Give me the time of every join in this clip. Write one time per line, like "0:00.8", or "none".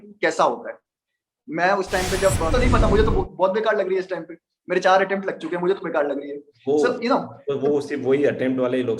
0:02.5